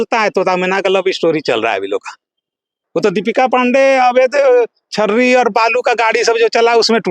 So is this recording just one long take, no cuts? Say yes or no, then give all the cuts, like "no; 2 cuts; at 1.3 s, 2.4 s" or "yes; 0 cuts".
no; 1 cut; at 2.8 s